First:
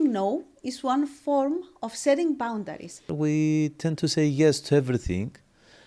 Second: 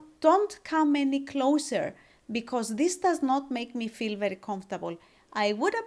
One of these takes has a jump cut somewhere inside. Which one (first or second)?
first